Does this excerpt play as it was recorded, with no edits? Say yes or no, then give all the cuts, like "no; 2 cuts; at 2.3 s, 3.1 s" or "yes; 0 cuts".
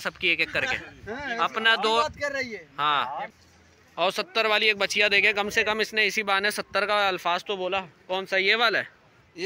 no; 1 cut; at 3.3 s